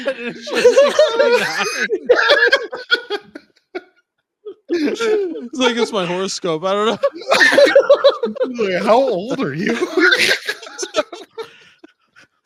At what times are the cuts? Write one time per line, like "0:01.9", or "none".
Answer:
none